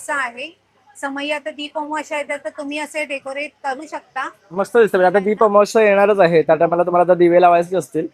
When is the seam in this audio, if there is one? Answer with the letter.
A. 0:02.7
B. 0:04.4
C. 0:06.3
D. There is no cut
D